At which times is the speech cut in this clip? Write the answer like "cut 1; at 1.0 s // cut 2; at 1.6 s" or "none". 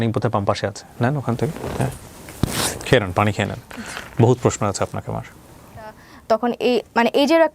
cut 1; at 6.1 s